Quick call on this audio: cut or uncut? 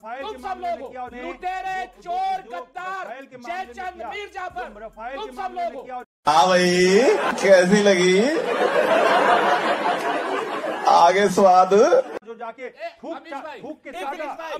uncut